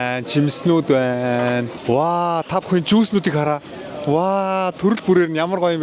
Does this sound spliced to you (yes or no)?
no